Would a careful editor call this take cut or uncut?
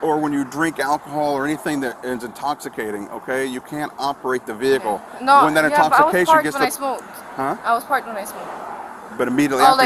uncut